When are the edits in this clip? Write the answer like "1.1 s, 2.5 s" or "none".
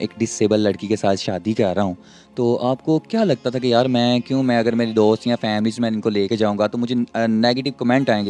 none